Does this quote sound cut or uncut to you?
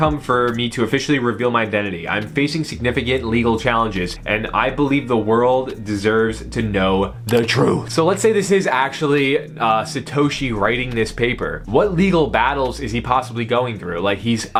uncut